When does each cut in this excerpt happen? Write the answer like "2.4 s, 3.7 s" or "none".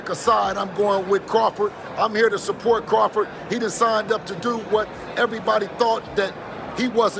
none